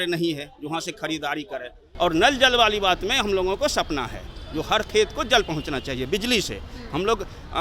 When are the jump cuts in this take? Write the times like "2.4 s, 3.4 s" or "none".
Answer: 1.8 s